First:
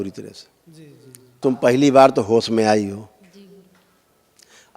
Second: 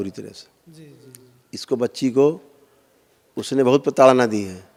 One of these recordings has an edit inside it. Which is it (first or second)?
first